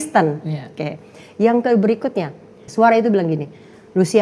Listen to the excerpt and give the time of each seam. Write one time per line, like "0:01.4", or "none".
0:02.6